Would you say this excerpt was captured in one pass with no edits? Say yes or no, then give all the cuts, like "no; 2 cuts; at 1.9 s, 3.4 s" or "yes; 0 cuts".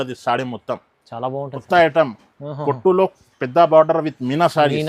no; 1 cut; at 1.5 s